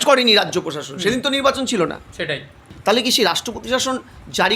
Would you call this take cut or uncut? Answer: cut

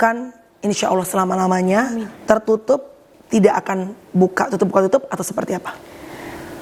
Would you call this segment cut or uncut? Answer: uncut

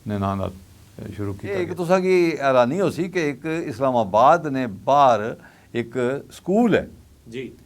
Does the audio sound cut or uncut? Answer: cut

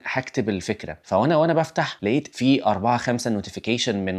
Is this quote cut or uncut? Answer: cut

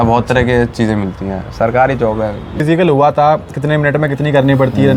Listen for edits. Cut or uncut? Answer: cut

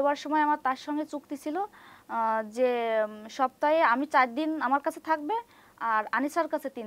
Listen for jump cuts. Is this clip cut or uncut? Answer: uncut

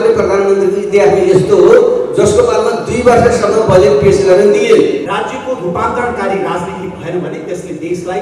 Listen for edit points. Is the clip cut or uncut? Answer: cut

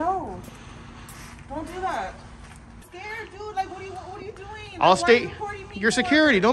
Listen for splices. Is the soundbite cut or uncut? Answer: cut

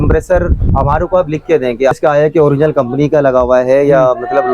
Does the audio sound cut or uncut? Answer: cut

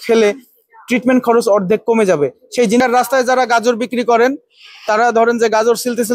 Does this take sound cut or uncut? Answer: cut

